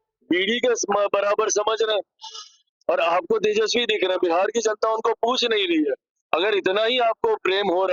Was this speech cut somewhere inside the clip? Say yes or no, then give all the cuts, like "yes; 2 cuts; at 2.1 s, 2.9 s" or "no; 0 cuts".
no; 0 cuts